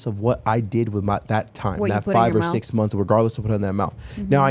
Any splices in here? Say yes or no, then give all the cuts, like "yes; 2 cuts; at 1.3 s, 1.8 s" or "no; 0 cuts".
no; 0 cuts